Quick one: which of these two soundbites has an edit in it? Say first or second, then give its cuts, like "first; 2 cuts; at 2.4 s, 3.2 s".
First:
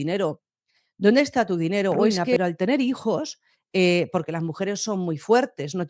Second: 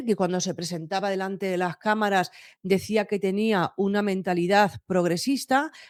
first; 1 cut; at 2.2 s